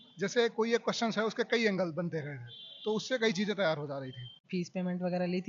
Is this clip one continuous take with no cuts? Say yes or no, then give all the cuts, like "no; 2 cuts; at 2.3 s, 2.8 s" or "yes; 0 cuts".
yes; 0 cuts